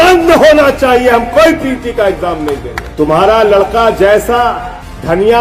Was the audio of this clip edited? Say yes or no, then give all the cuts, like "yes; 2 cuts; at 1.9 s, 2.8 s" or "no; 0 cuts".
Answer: yes; 1 cut; at 2.8 s